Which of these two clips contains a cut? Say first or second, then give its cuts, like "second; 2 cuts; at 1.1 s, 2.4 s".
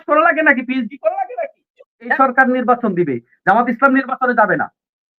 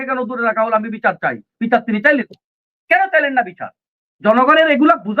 first; 1 cut; at 2.1 s